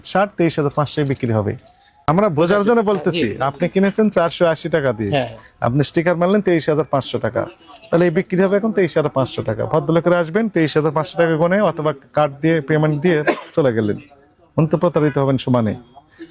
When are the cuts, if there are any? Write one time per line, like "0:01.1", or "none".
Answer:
0:02.1